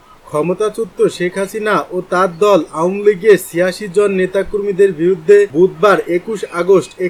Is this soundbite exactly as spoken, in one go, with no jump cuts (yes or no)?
yes